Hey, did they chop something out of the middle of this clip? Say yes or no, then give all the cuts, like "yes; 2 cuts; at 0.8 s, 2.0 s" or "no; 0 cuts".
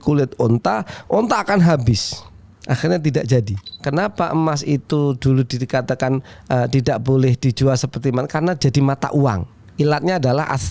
yes; 1 cut; at 3.6 s